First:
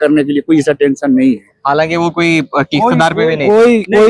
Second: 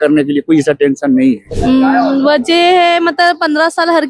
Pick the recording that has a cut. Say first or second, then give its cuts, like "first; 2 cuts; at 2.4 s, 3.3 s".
second; 1 cut; at 1.5 s